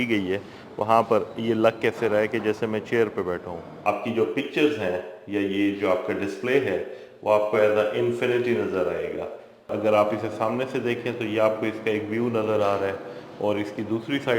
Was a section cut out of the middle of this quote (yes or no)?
yes